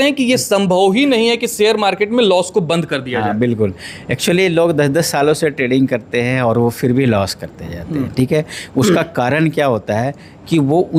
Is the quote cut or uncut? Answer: uncut